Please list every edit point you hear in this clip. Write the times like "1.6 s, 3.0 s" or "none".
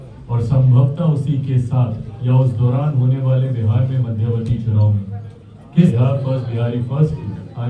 5.9 s